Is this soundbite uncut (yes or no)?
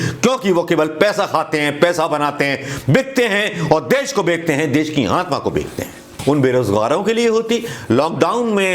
no